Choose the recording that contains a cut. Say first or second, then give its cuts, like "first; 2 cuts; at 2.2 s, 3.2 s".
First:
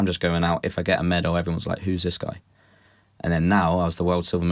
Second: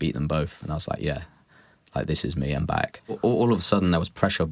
second; 1 cut; at 3.2 s